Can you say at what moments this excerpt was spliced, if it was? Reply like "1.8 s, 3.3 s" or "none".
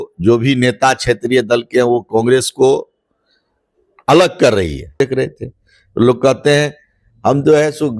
5.0 s